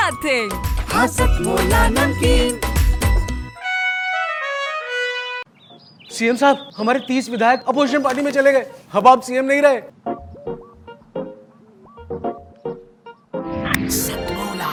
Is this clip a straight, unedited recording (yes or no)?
yes